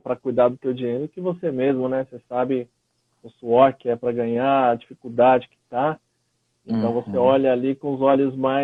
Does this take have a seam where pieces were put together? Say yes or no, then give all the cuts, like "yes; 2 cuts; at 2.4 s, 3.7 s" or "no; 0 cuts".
no; 0 cuts